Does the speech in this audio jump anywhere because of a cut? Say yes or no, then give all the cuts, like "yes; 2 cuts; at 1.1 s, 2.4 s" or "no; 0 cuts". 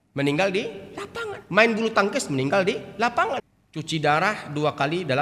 yes; 1 cut; at 3.5 s